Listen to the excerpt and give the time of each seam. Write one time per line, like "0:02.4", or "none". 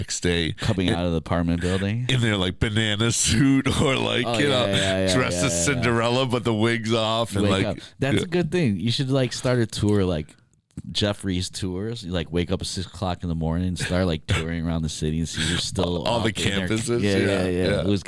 none